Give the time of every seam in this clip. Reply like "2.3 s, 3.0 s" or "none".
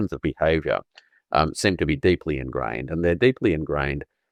none